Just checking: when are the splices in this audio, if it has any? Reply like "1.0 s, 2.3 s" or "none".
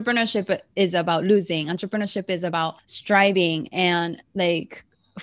2.9 s